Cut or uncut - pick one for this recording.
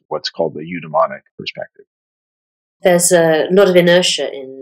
cut